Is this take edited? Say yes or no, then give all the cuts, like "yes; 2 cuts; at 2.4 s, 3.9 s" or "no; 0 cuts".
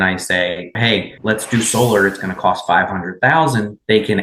no; 0 cuts